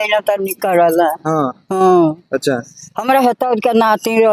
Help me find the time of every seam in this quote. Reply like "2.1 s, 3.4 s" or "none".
none